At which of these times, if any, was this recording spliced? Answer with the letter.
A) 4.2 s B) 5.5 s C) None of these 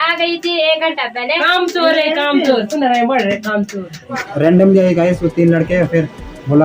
A